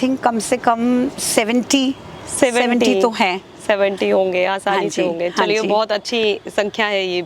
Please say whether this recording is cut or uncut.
uncut